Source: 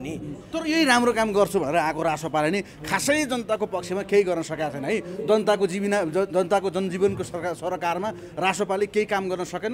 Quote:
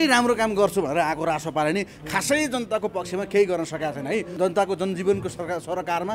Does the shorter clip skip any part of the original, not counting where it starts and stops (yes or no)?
yes